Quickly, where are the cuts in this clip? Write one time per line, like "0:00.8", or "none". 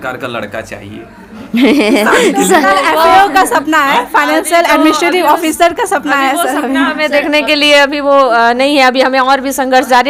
none